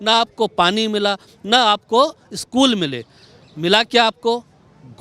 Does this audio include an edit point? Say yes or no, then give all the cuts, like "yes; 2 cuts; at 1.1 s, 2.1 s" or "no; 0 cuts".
no; 0 cuts